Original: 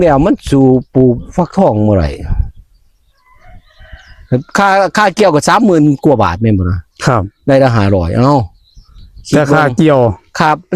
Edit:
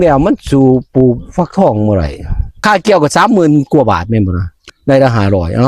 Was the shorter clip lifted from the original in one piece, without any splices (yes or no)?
no